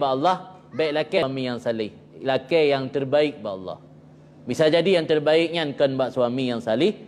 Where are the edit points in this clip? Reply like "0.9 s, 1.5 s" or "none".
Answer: 1.2 s